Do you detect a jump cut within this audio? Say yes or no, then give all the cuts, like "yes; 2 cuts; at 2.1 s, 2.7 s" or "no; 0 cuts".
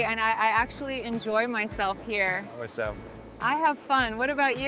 no; 0 cuts